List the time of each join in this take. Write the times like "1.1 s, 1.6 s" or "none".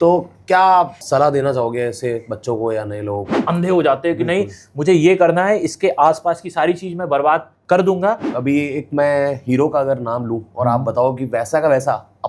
1.0 s, 3.3 s, 7.5 s, 8.3 s